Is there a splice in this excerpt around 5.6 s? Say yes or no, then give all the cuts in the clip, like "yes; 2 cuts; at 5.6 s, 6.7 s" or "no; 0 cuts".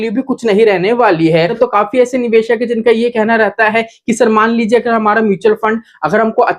no; 1 cut; at 1.5 s